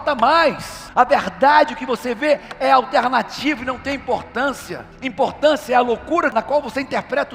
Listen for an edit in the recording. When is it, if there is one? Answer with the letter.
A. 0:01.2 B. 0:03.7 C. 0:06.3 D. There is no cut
C